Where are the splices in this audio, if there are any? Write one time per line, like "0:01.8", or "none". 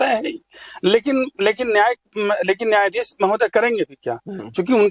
none

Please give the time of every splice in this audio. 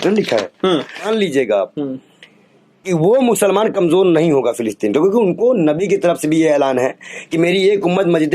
0:01.1

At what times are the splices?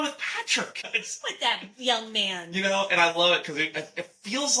0:01.0

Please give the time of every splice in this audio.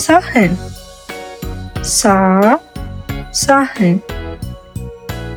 none

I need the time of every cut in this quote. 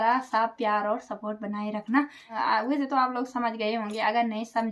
0:02.2

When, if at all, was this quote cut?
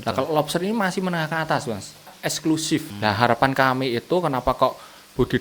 0:02.1
0:02.9

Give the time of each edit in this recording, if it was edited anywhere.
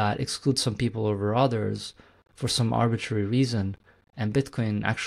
none

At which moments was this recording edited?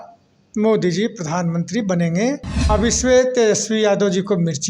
0:02.5

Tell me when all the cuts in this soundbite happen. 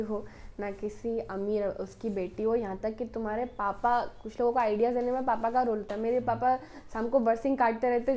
none

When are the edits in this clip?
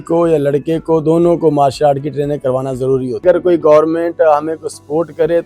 0:03.2

